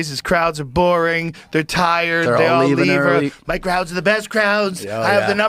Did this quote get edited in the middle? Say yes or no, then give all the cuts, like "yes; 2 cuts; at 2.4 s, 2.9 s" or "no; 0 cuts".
no; 0 cuts